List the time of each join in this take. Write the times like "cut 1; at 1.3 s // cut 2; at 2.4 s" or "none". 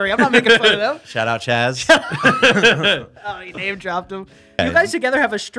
cut 1; at 4.6 s